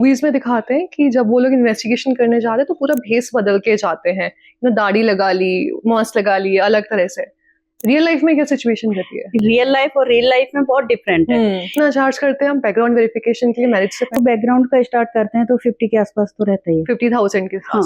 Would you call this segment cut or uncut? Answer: cut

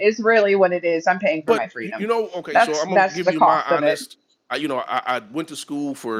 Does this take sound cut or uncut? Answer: uncut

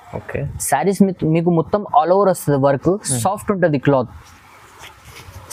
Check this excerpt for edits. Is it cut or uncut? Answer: uncut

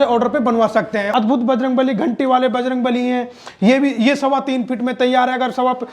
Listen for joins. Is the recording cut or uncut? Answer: cut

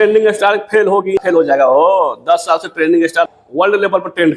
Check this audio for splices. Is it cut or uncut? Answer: cut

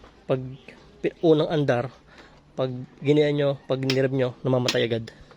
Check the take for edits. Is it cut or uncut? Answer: uncut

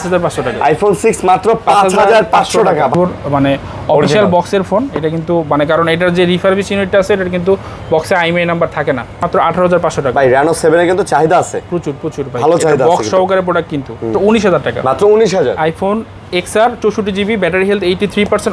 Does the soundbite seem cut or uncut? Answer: cut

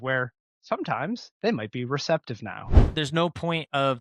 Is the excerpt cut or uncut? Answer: cut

